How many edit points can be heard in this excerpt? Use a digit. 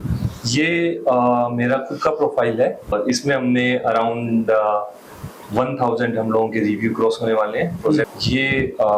2